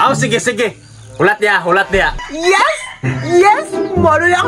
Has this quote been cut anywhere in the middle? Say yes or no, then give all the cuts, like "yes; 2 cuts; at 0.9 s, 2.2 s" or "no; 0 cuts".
yes; 1 cut; at 2.2 s